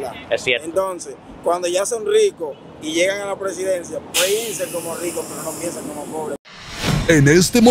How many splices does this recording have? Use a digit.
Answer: 1